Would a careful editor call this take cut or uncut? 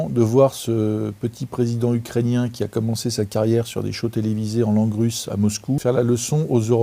cut